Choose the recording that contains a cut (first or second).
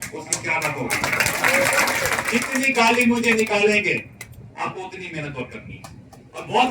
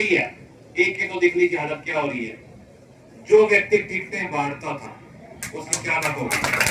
first